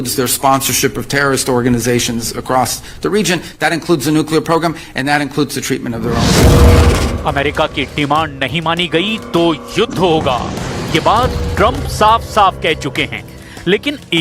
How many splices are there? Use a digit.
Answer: 0